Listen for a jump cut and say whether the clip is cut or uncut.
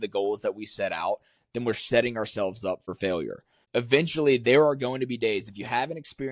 cut